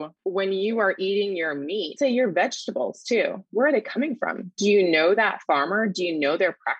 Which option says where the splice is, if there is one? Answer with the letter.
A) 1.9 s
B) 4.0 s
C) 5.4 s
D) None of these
A